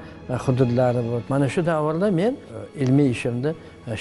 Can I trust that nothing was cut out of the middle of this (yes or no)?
no